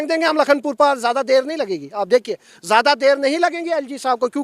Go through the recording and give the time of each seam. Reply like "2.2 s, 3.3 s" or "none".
none

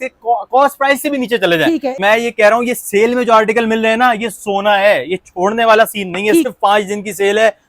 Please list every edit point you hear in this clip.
2.0 s, 6.5 s

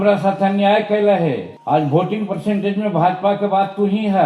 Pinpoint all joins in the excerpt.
1.5 s

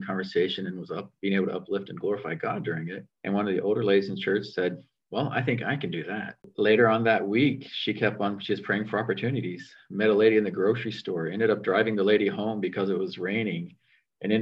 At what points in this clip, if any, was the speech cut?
3.1 s, 4.9 s, 6.5 s

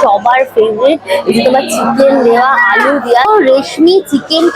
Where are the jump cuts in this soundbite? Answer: 3.2 s

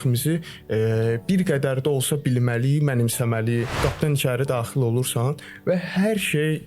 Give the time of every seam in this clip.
3.8 s

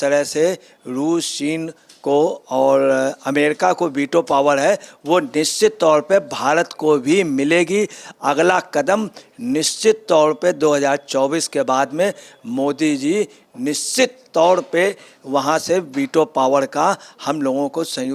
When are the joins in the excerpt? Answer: none

